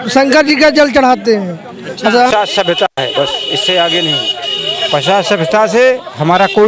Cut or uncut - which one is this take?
cut